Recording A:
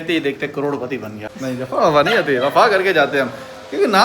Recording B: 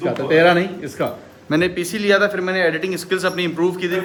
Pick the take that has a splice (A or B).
A